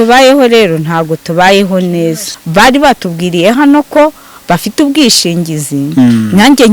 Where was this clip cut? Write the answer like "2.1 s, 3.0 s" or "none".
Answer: 2.4 s